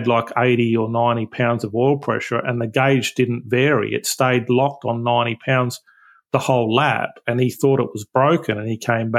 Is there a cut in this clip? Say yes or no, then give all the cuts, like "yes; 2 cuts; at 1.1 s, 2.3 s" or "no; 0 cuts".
no; 0 cuts